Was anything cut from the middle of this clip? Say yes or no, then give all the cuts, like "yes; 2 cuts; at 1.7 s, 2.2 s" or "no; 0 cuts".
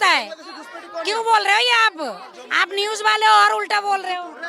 no; 0 cuts